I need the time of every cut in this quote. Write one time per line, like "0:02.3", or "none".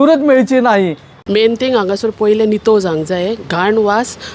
0:01.1